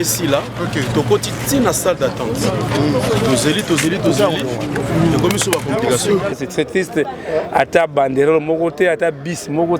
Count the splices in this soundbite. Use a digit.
1